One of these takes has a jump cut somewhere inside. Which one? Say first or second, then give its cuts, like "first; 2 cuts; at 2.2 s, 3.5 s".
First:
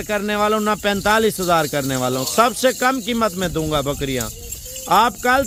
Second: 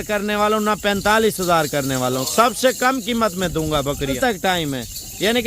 second; 1 cut; at 4.2 s